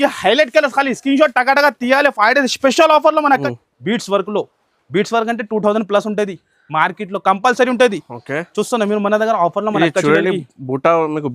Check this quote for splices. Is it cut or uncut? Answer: cut